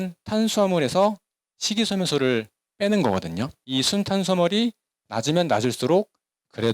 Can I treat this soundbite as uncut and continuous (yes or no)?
no